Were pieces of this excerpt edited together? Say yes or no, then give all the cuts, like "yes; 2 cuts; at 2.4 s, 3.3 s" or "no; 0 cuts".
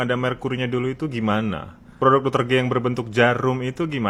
no; 0 cuts